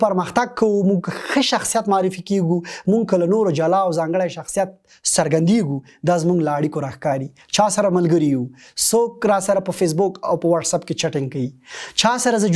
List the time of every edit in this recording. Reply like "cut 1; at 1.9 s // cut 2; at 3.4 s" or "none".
none